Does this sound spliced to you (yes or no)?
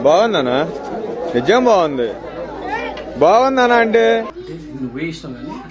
yes